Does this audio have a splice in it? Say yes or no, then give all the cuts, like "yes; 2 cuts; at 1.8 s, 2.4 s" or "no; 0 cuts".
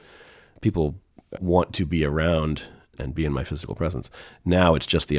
yes; 2 cuts; at 1.3 s, 2.9 s